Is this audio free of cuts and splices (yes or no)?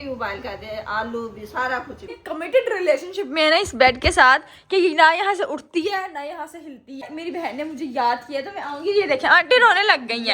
no